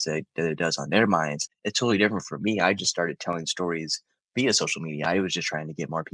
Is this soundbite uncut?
no; 1 cut; at 1.5 s

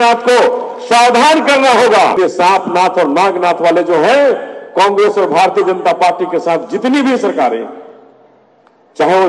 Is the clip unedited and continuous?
no; 1 cut; at 2.2 s

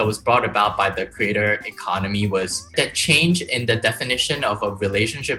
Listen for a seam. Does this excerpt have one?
yes; 1 cut; at 2.7 s

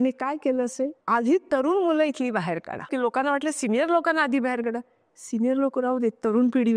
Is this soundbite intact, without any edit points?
no; 2 cuts; at 1.0 s, 2.9 s

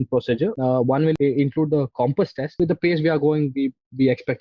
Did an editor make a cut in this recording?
yes; 2 cuts; at 1.0 s, 2.6 s

